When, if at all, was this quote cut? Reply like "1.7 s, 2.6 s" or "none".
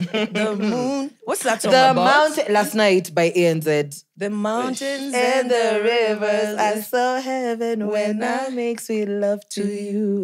none